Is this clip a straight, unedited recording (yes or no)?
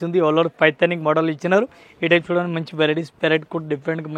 yes